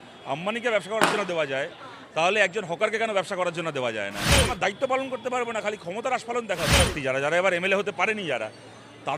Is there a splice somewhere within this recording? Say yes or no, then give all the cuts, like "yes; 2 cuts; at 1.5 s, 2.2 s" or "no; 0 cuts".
yes; 2 cuts; at 4.5 s, 6.9 s